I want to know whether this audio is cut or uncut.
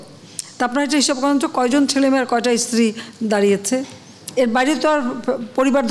uncut